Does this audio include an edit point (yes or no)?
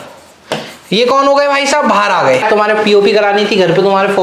yes